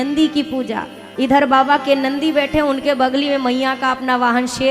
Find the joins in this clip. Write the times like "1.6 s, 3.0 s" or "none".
1.0 s